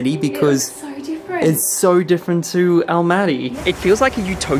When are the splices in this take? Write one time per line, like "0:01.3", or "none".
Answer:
0:03.5